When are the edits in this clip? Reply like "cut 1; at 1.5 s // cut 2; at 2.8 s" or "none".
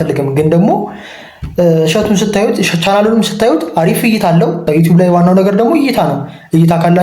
cut 1; at 4.7 s